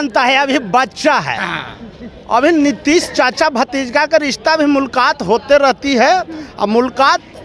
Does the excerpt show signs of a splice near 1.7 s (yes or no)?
no